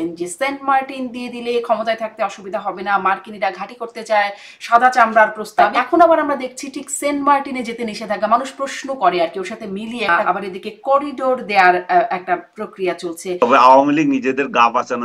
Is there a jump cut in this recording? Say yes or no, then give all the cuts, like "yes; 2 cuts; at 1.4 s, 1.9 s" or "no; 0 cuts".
yes; 3 cuts; at 5.7 s, 10.1 s, 13.4 s